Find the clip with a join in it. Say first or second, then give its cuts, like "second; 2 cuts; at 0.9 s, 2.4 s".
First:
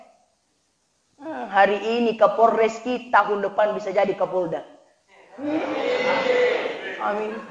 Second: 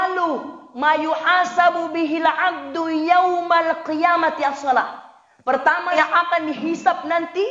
second; 1 cut; at 5.9 s